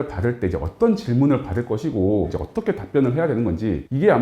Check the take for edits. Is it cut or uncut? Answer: cut